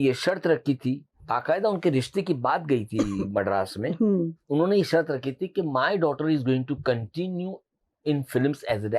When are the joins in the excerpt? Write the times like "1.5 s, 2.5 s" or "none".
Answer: 1.1 s, 4.4 s